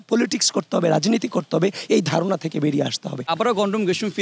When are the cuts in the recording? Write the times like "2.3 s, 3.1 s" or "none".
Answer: 3.3 s